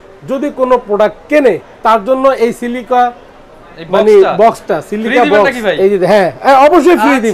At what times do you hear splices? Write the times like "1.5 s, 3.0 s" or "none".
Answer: none